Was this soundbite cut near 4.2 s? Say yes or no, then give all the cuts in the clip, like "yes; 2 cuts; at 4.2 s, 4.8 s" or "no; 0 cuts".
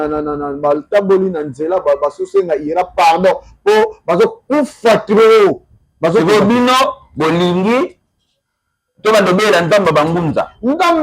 no; 0 cuts